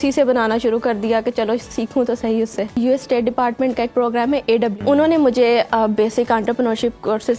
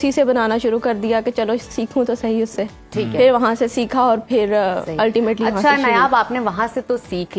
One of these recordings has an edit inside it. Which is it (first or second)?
first